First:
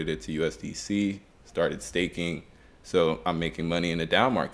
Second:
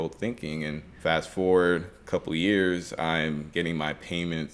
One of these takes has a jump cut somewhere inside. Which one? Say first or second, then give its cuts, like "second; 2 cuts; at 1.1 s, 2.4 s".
second; 3 cuts; at 1.0 s, 1.9 s, 3.5 s